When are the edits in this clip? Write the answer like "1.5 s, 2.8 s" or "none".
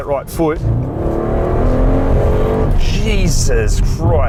none